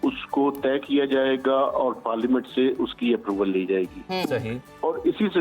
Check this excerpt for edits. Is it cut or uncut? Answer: uncut